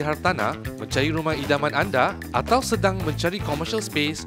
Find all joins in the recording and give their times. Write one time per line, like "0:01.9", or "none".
none

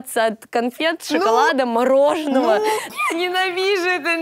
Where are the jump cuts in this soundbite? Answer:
0:02.9

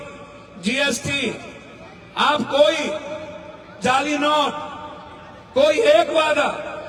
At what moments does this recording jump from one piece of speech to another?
none

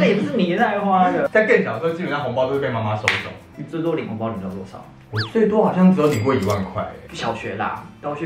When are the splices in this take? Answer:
none

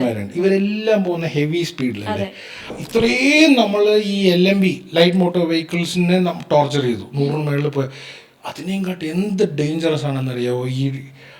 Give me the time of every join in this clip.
0:02.7

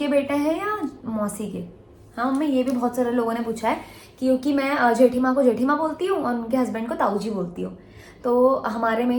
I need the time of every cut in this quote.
none

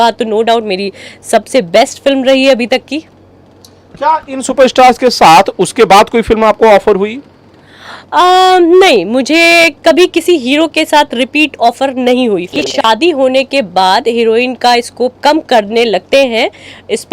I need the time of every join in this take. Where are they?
0:12.6

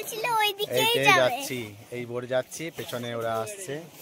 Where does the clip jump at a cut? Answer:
none

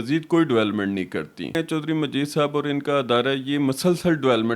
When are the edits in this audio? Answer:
0:01.6

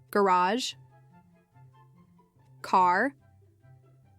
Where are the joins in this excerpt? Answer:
0:01.1
0:02.6
0:03.3

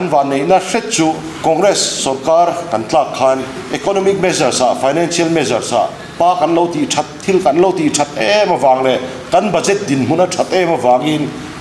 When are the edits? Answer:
0:01.3
0:03.6
0:06.0

